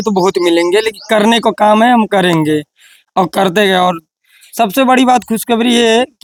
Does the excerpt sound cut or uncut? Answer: uncut